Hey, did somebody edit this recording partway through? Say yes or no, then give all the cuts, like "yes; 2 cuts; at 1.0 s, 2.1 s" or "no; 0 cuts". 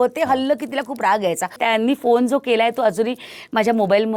yes; 1 cut; at 1.6 s